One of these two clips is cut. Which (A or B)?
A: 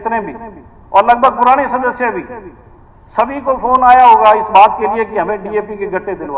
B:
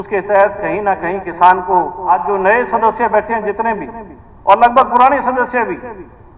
B